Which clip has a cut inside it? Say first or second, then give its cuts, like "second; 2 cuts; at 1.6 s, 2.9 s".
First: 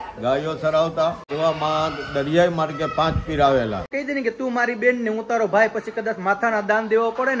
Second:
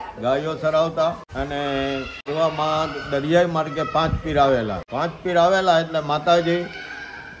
first; 2 cuts; at 1.2 s, 3.9 s